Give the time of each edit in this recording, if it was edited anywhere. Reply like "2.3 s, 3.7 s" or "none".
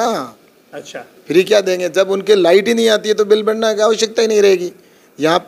none